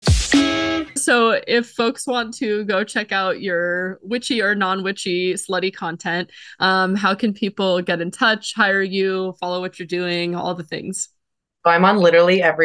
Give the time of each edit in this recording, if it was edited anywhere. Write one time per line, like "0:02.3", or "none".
none